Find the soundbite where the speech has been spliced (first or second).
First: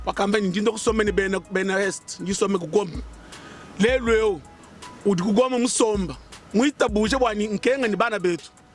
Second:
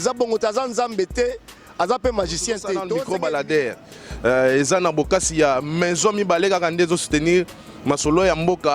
second